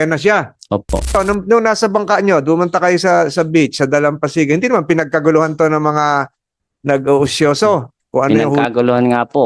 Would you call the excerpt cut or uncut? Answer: cut